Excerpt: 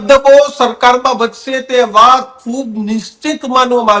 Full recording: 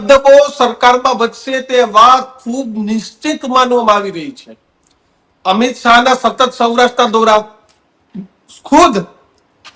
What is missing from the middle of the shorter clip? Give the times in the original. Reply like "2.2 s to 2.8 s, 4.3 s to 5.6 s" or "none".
none